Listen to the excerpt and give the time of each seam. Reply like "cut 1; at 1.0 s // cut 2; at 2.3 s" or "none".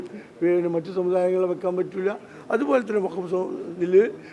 none